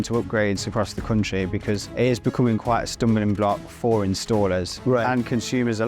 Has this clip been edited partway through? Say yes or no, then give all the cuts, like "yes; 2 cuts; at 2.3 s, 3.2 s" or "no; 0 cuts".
yes; 2 cuts; at 1.9 s, 4.7 s